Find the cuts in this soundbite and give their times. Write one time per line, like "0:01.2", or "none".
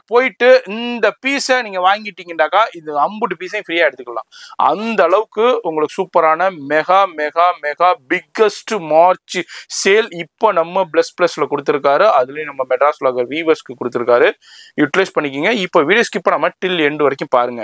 none